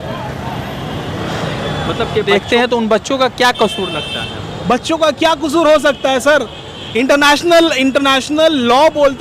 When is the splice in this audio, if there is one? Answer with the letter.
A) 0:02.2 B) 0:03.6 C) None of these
A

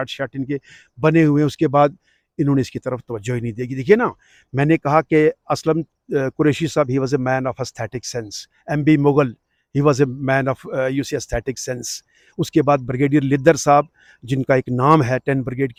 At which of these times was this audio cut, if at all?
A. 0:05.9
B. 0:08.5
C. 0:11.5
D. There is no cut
D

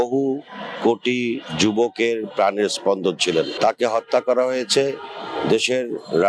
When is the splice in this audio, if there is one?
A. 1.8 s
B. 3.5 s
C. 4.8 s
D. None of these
B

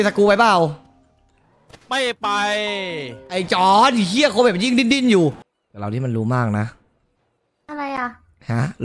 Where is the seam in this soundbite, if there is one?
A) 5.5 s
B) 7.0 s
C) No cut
A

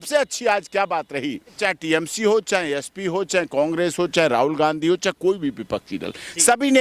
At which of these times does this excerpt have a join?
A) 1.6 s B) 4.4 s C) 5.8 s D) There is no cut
A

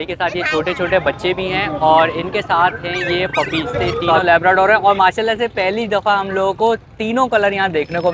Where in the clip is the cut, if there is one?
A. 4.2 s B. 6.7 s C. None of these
A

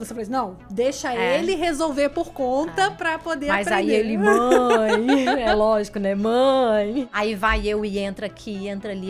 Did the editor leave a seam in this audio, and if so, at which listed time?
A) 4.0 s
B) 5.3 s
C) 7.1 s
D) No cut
C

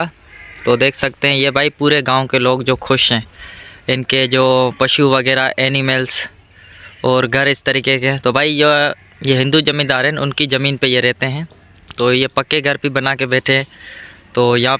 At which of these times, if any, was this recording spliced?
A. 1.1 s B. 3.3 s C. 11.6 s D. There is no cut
D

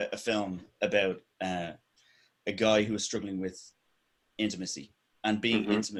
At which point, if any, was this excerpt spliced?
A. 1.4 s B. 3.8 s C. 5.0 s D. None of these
D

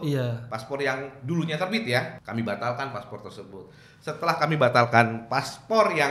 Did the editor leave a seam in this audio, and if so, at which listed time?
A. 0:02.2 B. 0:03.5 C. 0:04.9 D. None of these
A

